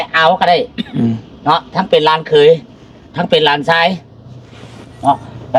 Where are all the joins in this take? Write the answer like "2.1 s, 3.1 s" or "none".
none